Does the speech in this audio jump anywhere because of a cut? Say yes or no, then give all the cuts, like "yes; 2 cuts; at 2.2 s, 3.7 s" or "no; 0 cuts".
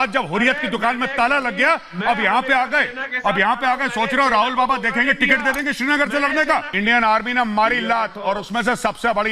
yes; 1 cut; at 6.7 s